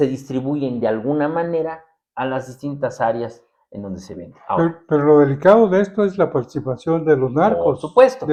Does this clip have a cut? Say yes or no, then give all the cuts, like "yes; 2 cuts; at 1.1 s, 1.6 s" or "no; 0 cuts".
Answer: no; 0 cuts